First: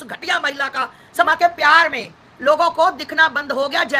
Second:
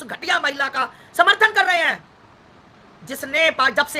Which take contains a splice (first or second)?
first